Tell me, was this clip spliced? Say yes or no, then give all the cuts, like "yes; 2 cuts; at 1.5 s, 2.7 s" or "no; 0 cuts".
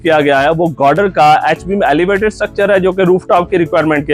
no; 0 cuts